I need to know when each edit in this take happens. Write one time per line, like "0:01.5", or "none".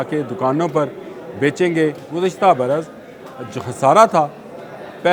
0:02.0